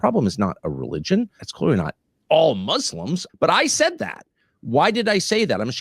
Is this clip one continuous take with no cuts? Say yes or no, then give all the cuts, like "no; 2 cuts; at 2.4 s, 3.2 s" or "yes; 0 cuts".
no; 2 cuts; at 1.4 s, 3.2 s